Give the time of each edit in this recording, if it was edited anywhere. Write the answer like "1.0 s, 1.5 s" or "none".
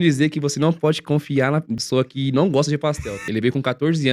1.8 s, 3.2 s